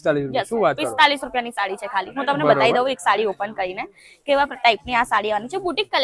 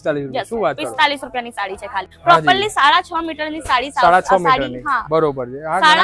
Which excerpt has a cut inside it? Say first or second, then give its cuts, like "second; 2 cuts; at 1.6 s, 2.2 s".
second; 1 cut; at 2.1 s